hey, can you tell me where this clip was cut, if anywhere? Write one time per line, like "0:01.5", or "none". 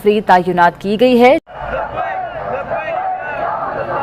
0:01.6